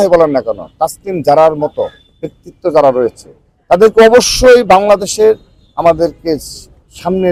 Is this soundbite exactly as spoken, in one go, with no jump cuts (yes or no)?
yes